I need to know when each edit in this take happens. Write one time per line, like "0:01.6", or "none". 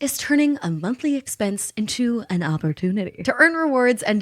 0:03.1